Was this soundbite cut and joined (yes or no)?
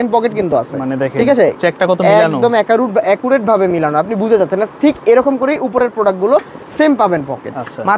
no